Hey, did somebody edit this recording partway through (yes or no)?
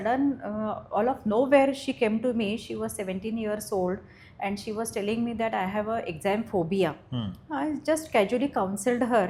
no